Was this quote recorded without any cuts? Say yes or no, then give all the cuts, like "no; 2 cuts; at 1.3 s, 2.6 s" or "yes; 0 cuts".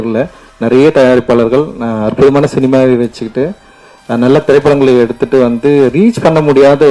yes; 0 cuts